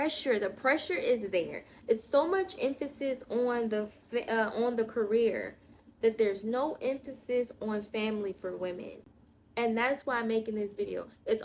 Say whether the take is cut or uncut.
uncut